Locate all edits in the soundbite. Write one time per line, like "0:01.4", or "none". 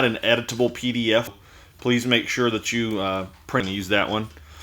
0:01.4
0:03.6